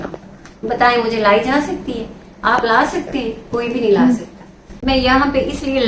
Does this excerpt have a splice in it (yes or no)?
yes